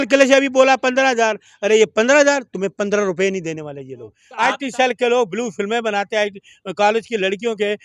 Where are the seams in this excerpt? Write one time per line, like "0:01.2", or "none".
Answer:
0:04.2